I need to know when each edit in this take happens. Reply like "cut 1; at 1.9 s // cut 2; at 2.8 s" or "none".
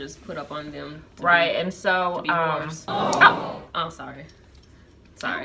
none